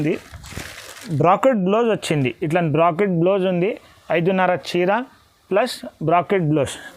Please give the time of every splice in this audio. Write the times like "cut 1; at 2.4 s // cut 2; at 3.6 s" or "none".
cut 1; at 1.1 s